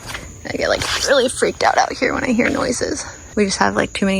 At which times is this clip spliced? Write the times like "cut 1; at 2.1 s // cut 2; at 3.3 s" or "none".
cut 1; at 3.1 s